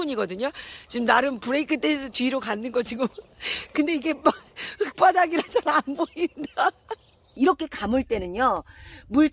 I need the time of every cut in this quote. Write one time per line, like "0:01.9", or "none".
0:07.2